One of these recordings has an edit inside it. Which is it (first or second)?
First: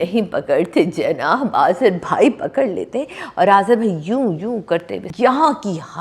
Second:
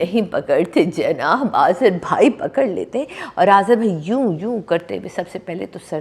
first